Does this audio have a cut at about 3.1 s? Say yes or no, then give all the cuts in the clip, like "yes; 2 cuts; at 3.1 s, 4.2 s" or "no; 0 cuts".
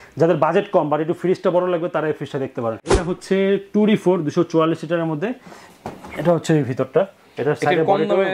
yes; 1 cut; at 3.1 s